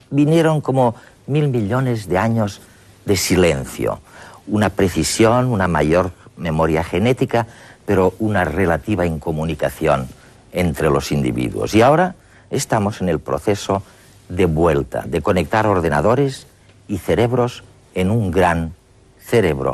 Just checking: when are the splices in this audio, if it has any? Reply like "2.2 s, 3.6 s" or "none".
5.1 s